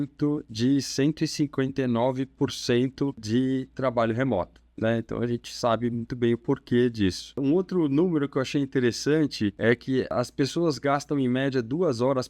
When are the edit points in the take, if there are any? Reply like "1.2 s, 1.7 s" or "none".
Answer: 3.2 s, 7.4 s, 9.9 s